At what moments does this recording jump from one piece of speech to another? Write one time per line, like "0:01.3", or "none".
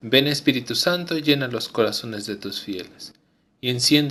none